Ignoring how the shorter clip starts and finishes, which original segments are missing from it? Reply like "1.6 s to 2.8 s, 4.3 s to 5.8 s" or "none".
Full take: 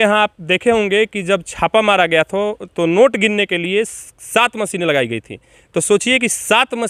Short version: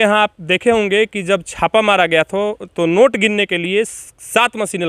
none